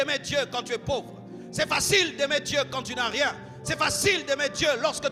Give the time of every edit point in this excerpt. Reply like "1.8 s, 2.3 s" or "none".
none